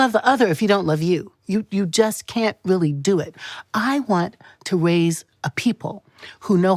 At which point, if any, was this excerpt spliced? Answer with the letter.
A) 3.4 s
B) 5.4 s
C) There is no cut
A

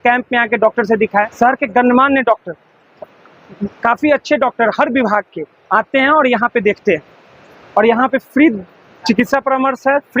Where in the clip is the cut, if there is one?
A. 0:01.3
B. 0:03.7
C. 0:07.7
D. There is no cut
A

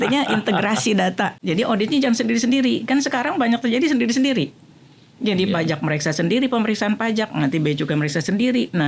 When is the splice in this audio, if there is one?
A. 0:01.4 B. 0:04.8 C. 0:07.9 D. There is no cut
A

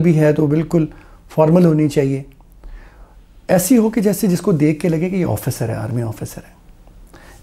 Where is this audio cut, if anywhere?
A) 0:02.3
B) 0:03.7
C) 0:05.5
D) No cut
D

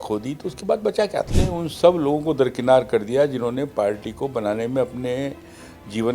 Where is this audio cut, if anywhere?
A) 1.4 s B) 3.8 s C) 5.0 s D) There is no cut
A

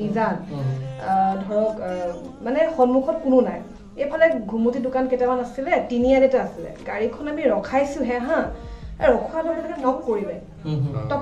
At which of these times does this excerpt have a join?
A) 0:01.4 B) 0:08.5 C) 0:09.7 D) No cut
C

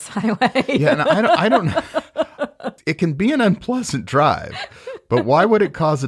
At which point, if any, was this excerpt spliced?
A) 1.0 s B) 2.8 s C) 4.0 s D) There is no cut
B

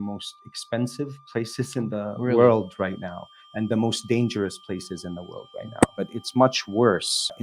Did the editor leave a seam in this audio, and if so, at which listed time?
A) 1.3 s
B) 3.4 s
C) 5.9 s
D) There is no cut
C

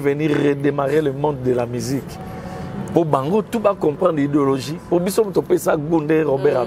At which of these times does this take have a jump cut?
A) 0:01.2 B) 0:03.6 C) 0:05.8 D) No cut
D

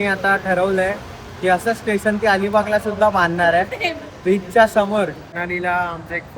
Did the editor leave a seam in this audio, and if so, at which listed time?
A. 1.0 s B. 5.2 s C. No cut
B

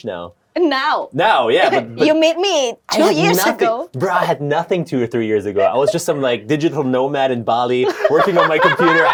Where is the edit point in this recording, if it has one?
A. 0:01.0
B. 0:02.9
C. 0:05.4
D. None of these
D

